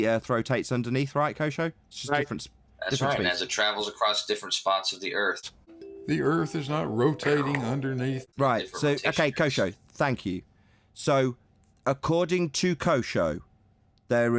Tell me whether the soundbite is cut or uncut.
cut